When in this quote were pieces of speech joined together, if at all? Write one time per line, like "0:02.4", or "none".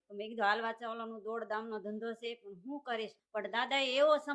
0:03.2